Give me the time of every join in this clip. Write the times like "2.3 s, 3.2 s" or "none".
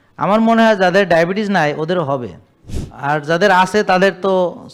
none